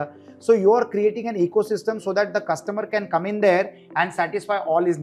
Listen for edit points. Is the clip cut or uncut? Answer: uncut